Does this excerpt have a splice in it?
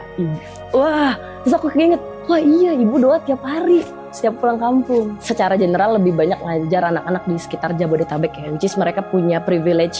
yes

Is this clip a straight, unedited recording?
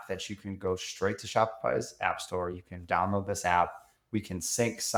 yes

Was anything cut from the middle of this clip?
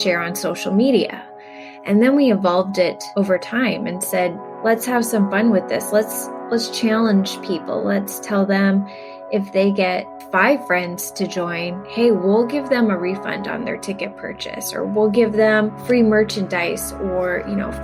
yes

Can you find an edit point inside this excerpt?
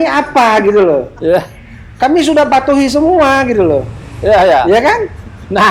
no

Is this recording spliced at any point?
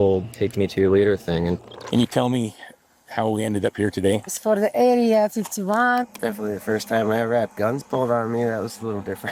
yes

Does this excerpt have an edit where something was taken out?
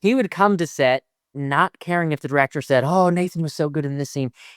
yes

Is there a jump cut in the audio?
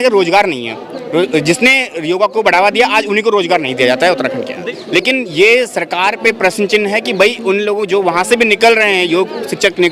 no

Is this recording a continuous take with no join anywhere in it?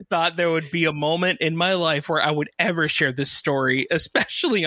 yes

